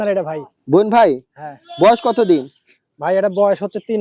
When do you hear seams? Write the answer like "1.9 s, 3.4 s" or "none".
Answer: none